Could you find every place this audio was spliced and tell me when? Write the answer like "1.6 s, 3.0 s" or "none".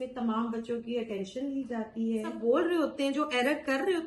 2.4 s

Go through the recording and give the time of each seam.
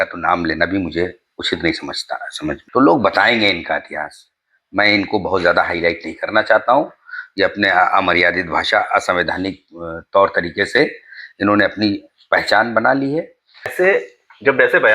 2.6 s, 13.7 s

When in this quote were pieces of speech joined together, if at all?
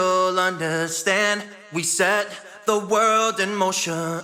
none

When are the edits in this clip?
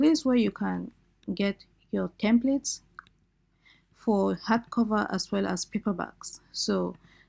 none

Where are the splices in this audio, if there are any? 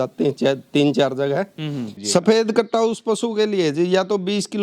1.9 s

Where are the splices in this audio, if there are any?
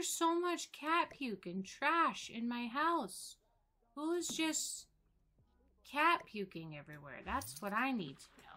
none

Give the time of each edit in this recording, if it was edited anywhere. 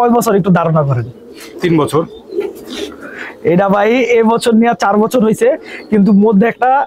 none

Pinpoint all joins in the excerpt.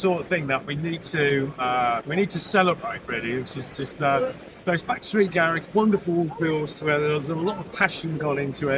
none

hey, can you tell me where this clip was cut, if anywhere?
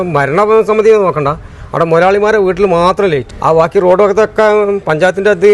3.3 s

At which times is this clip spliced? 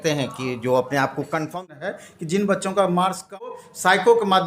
1.5 s, 3.5 s

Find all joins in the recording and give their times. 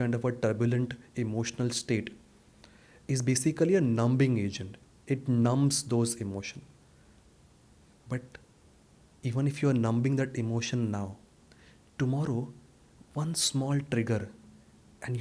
none

